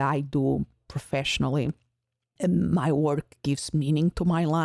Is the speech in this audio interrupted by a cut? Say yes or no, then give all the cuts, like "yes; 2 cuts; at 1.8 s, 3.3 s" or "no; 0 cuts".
no; 0 cuts